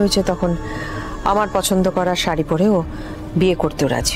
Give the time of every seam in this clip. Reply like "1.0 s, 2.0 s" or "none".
none